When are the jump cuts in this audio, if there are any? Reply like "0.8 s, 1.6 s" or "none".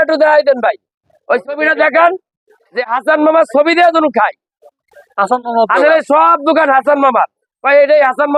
none